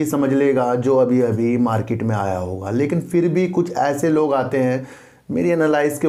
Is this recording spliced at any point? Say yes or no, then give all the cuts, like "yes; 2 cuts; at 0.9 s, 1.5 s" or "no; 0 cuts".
no; 0 cuts